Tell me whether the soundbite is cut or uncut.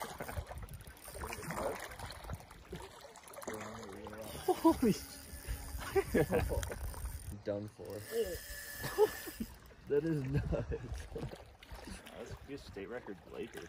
cut